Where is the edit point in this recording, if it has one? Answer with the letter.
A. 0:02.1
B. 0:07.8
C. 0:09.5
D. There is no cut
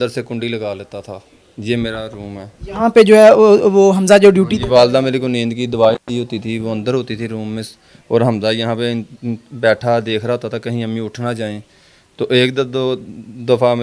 D